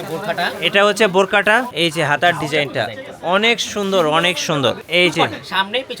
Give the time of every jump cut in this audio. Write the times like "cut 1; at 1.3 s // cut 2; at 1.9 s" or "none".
cut 1; at 1.7 s // cut 2; at 4.8 s